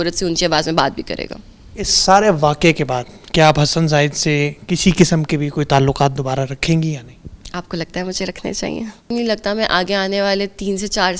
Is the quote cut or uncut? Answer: cut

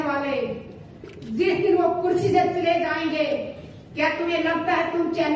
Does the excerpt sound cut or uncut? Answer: uncut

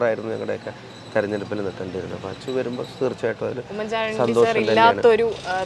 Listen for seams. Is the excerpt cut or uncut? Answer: uncut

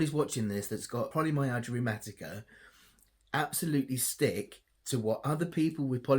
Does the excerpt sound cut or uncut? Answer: cut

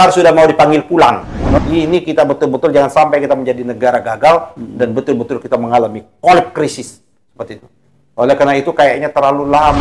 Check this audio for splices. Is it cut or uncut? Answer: cut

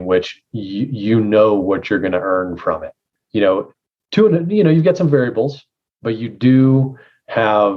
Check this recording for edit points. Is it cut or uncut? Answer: uncut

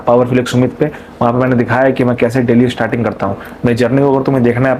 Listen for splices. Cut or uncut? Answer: uncut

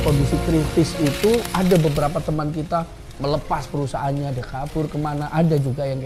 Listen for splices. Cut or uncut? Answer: uncut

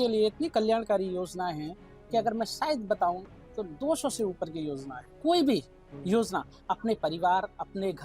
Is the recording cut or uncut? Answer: cut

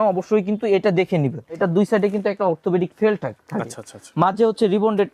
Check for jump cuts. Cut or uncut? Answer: cut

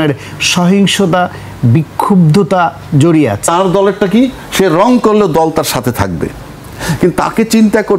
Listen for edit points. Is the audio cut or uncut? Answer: cut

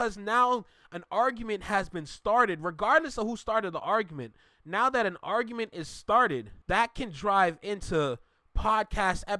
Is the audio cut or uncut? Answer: cut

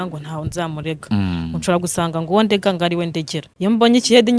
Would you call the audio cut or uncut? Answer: cut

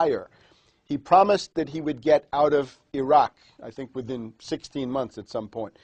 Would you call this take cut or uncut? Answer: uncut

